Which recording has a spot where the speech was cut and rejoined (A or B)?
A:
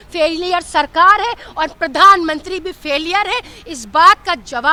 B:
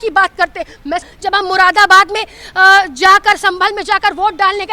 B